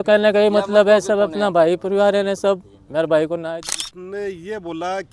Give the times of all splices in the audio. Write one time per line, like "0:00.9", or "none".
0:03.5